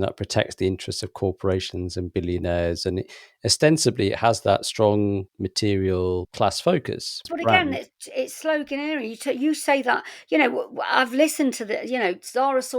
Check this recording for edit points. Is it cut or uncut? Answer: cut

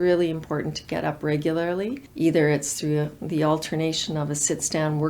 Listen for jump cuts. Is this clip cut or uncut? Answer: cut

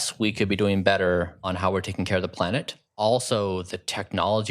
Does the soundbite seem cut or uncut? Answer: cut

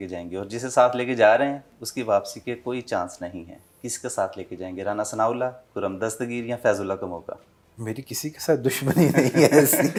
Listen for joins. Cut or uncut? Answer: uncut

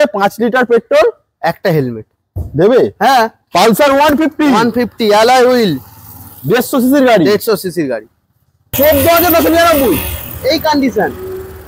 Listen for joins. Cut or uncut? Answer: cut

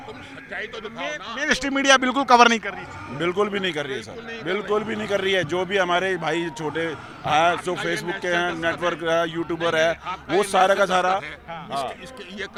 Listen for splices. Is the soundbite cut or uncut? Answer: uncut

